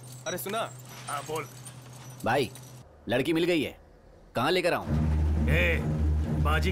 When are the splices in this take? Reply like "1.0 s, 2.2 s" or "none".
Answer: none